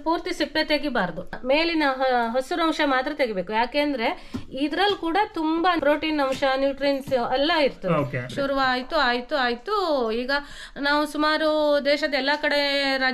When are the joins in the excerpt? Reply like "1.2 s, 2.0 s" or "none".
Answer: 1.3 s, 5.8 s, 8.3 s